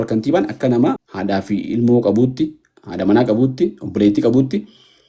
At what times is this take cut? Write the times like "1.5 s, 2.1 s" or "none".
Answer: 1.1 s